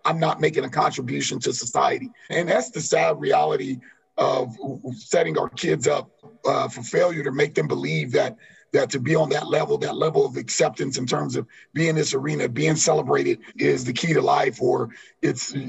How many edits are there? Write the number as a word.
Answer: three